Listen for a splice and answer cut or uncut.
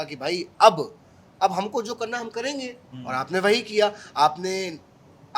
uncut